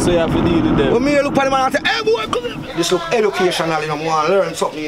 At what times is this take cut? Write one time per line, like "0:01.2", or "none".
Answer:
0:02.5